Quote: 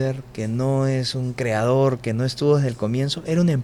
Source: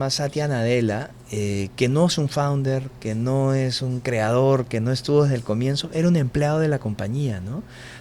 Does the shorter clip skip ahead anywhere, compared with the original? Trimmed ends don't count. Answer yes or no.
no